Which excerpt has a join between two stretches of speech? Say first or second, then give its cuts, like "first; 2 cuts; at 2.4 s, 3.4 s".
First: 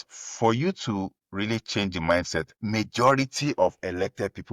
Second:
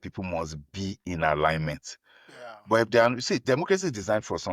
first; 2 cuts; at 1.2 s, 2.5 s